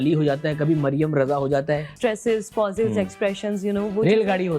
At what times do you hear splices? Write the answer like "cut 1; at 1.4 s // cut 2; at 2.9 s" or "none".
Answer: cut 1; at 1.9 s

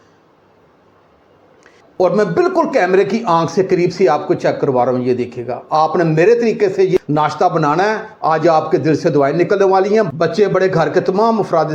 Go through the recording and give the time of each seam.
cut 1; at 1.8 s

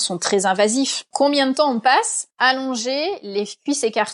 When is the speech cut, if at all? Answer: cut 1; at 1.0 s // cut 2; at 2.2 s

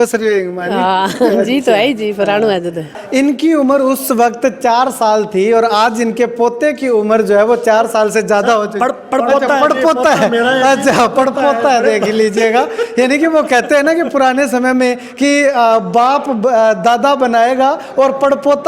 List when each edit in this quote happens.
cut 1; at 3.0 s

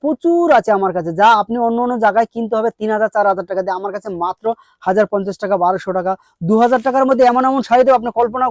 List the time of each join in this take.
none

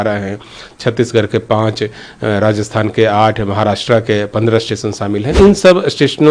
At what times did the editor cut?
cut 1; at 5.4 s

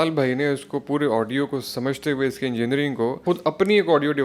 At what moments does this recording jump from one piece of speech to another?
cut 1; at 3.2 s

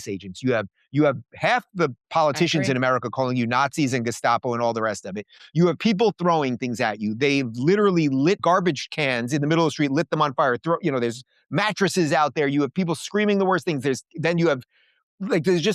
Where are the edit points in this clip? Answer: cut 1; at 8.4 s

